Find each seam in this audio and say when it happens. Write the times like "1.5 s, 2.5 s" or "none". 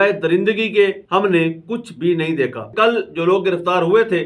1.0 s, 2.7 s